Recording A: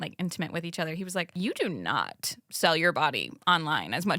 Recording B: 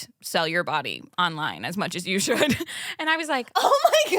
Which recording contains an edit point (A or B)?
A